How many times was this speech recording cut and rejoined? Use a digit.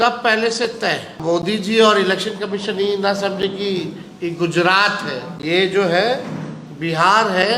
2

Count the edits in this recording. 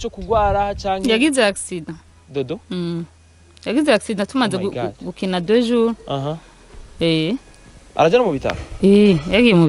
0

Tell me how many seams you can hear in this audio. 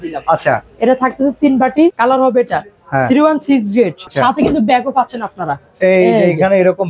2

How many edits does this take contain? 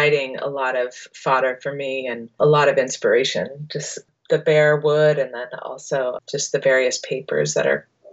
0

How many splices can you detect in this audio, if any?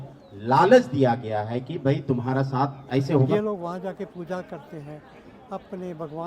1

